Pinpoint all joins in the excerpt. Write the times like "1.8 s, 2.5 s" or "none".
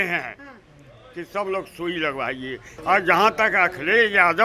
2.7 s